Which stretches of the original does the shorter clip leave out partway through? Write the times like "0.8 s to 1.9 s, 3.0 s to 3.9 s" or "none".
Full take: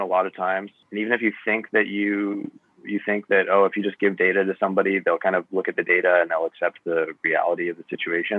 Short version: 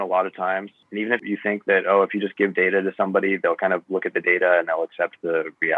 1.2 s to 2.8 s